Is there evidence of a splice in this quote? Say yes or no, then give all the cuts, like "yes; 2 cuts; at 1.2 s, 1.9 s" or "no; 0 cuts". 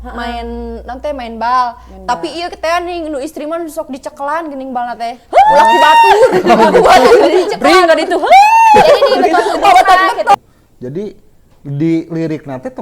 yes; 1 cut; at 10.3 s